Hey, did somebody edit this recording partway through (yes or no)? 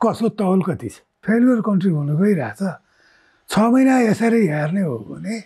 yes